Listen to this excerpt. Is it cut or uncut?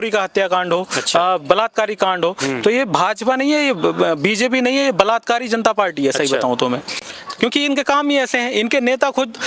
uncut